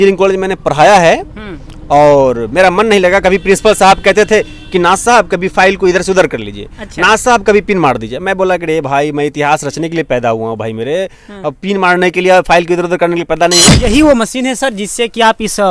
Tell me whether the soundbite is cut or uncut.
cut